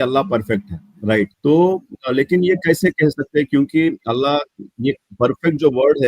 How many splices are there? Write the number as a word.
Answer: one